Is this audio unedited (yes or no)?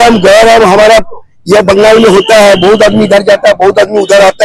yes